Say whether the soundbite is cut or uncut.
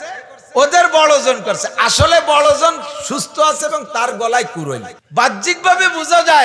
cut